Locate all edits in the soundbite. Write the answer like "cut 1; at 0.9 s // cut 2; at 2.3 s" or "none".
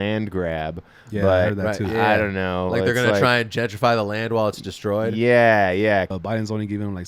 cut 1; at 6.1 s